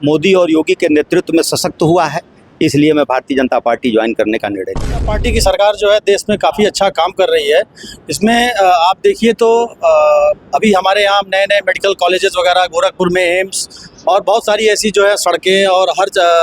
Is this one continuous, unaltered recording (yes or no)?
no